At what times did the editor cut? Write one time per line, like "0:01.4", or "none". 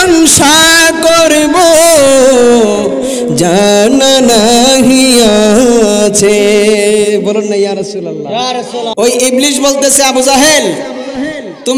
0:08.9

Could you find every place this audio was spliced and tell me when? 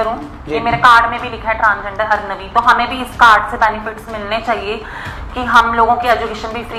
none

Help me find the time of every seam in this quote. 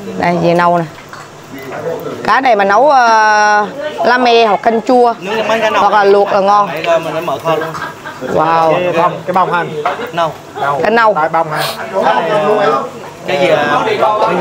none

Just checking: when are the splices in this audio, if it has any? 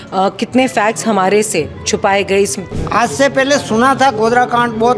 0:02.7

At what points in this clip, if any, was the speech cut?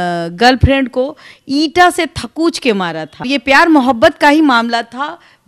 0:03.3

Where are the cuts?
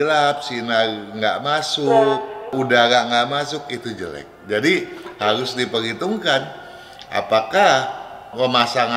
none

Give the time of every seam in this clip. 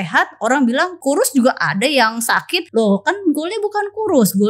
0:00.9
0:02.6

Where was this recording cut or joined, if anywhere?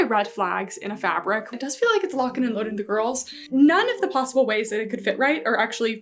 0:01.5
0:03.4

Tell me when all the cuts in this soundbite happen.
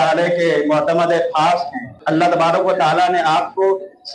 0:02.0

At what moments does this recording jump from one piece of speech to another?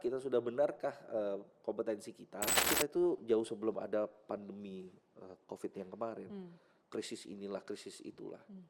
0:02.7

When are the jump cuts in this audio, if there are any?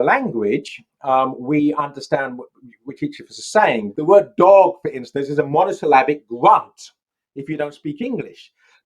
0:03.9

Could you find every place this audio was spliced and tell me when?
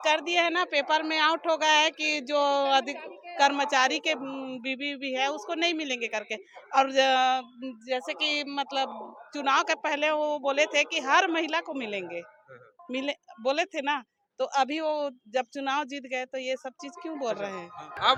none

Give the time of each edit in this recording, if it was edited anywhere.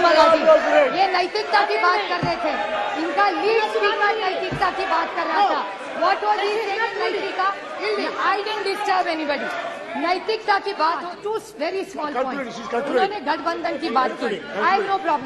0:11.1

